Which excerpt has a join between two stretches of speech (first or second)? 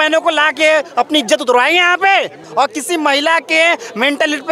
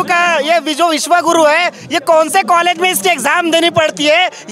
first